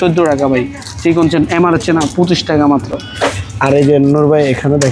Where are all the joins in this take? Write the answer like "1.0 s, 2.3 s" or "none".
none